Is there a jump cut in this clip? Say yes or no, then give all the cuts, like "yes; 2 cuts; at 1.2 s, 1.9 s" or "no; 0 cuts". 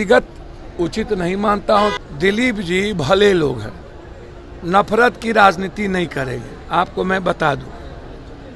yes; 1 cut; at 2.0 s